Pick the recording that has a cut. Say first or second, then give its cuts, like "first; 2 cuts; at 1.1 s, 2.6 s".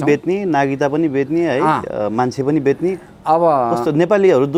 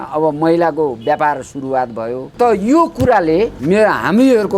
second; 2 cuts; at 2.3 s, 3.6 s